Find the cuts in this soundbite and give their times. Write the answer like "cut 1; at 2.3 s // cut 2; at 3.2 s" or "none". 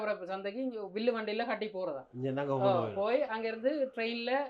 none